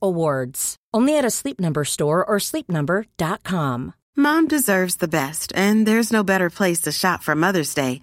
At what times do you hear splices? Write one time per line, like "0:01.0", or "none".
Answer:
0:03.9